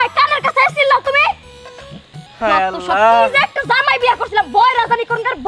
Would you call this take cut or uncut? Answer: uncut